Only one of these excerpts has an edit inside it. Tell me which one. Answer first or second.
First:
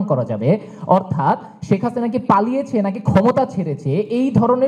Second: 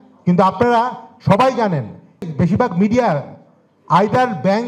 second